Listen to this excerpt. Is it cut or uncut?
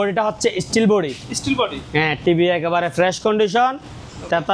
uncut